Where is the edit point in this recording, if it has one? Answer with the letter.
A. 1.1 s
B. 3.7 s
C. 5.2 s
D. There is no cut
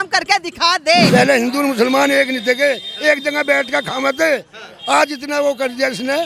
A